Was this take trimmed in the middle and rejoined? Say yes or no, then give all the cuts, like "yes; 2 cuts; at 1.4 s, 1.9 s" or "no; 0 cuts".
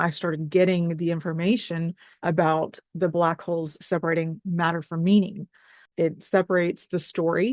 yes; 1 cut; at 5.8 s